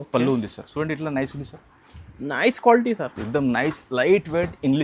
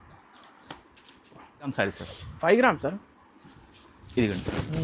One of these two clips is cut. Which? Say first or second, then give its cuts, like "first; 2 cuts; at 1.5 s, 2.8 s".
second; 1 cut; at 1.7 s